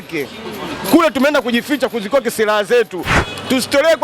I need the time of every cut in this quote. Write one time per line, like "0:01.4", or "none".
0:03.1